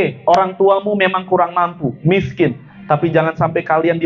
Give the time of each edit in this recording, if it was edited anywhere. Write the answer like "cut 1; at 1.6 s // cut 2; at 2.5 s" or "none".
none